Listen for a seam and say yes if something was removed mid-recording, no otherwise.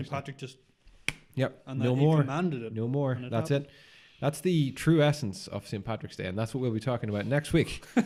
no